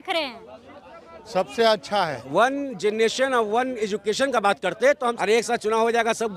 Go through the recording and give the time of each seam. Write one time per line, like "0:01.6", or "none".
0:02.2
0:05.2

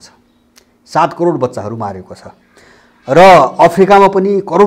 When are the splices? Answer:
none

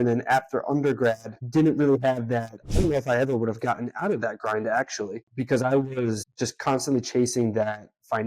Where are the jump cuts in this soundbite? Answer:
0:02.6

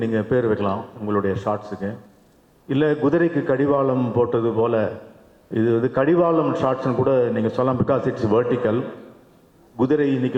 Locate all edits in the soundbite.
none

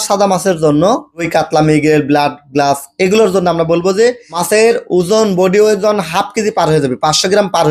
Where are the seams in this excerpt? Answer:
0:01.1
0:04.3

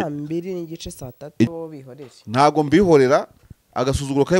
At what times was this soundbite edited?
0:01.5

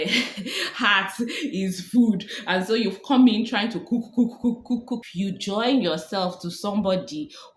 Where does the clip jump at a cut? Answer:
0:05.0

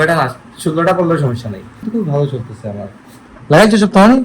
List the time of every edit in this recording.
0:01.8

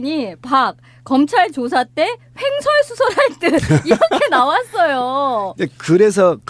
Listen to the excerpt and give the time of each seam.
0:03.1

